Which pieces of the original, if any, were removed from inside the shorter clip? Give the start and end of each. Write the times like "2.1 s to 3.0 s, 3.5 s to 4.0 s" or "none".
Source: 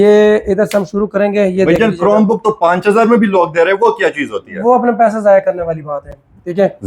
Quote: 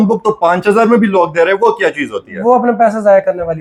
none